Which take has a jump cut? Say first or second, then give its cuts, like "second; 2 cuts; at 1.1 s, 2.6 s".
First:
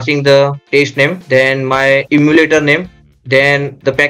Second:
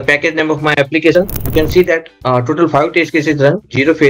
second; 1 cut; at 1.4 s